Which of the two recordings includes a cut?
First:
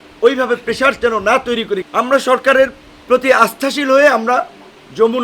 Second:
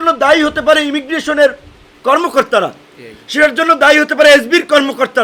first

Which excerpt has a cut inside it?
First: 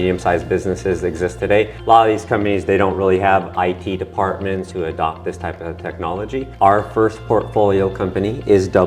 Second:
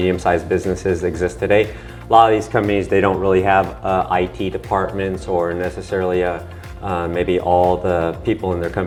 first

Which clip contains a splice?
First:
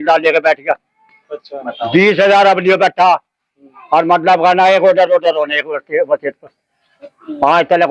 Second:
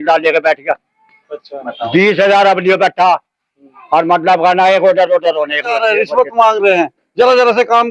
second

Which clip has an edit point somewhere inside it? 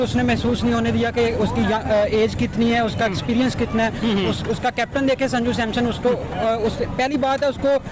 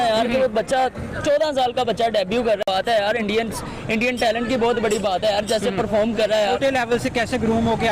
second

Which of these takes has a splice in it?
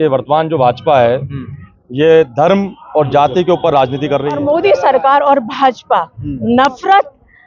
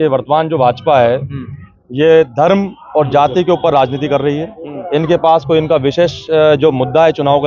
first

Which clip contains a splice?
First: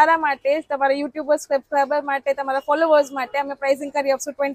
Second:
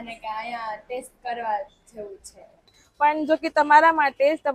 second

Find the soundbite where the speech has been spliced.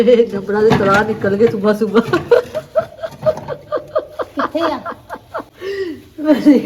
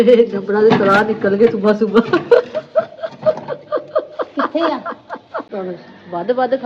second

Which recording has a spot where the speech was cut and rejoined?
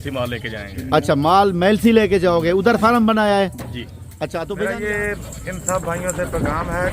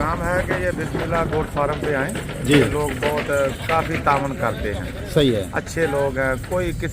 first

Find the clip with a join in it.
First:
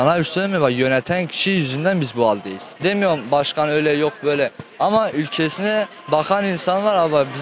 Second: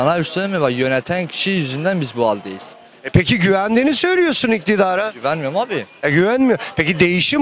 first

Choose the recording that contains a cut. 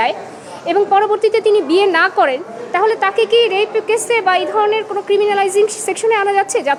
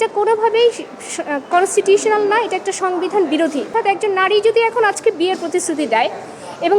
second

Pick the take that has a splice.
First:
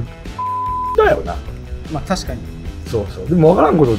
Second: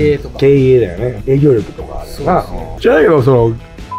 second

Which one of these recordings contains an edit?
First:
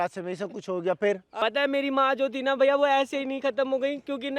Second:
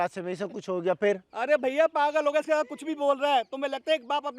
first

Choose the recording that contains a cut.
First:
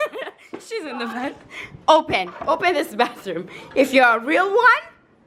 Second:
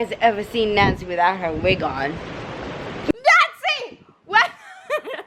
second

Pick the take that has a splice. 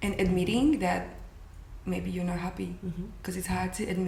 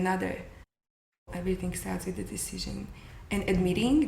second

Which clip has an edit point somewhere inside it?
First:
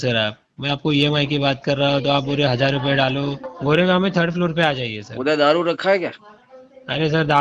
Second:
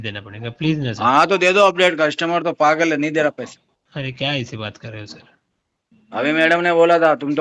first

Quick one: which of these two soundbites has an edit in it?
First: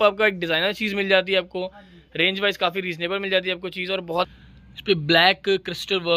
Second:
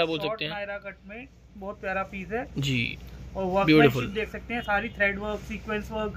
first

